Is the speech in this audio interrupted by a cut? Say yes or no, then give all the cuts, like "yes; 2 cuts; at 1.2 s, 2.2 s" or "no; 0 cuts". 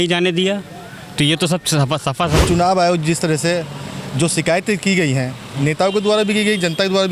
yes; 1 cut; at 2.4 s